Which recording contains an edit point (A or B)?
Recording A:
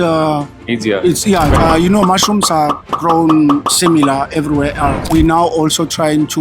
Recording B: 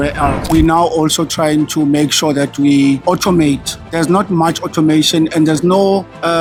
A